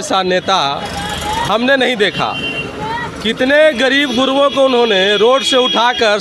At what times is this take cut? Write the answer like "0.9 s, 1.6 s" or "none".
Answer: none